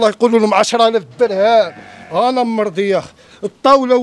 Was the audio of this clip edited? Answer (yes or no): no